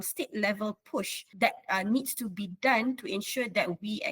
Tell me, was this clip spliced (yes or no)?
yes